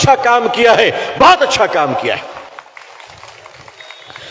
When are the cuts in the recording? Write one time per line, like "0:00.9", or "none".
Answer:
0:02.7